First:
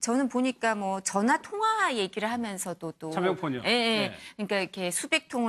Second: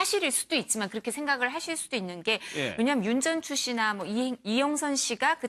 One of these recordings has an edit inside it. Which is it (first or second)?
second